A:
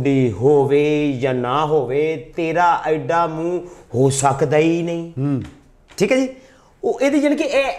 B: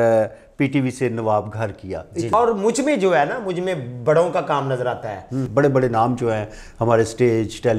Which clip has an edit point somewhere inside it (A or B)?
B